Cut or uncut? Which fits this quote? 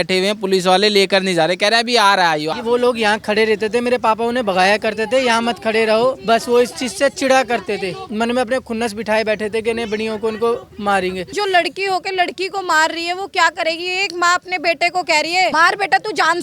cut